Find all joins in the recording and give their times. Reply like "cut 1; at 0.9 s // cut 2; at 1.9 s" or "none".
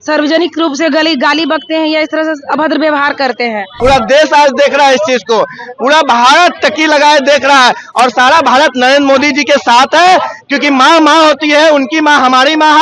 cut 1; at 3.8 s